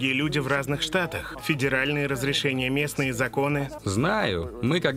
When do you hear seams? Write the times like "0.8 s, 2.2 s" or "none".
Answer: 1.3 s, 3.8 s

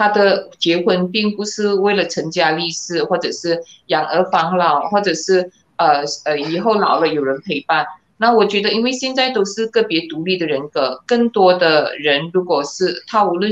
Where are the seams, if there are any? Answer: none

